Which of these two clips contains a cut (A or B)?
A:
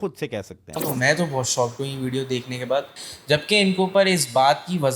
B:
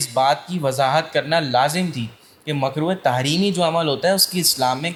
A